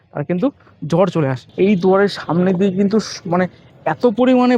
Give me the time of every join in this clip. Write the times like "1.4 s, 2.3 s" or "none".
1.4 s